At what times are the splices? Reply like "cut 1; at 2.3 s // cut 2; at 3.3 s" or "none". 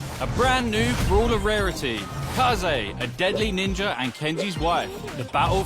cut 1; at 0.9 s